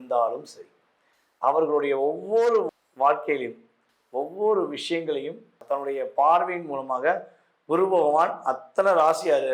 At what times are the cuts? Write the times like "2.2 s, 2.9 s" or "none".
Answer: 5.6 s